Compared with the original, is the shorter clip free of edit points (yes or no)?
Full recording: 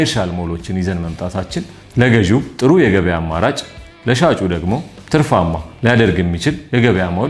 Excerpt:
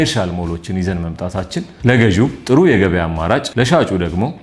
no